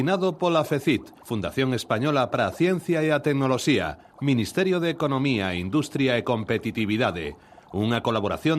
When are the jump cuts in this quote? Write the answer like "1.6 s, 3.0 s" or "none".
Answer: 1.2 s